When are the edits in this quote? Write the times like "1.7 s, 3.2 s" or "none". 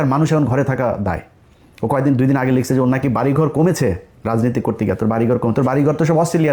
none